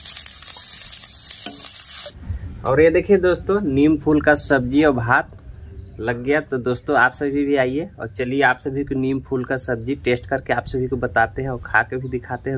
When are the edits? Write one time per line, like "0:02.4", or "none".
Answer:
0:01.9